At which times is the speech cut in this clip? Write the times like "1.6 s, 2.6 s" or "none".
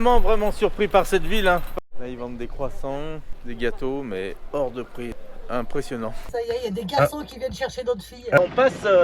1.7 s, 3.3 s, 5.2 s, 6.2 s, 8.4 s